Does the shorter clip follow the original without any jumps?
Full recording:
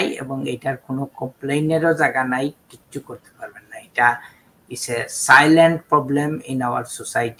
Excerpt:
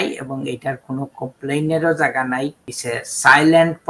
no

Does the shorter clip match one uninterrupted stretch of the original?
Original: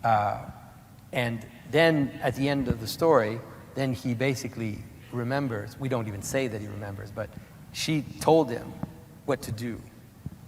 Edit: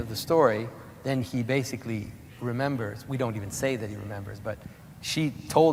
yes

